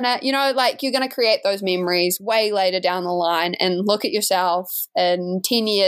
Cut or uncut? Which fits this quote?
uncut